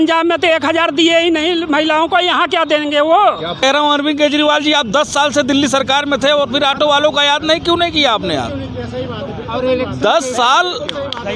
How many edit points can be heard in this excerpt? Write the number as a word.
one